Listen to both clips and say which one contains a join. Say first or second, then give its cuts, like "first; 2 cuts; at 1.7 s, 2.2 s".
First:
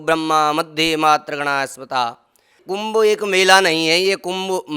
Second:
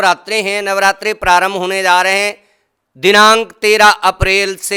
first; 1 cut; at 2.6 s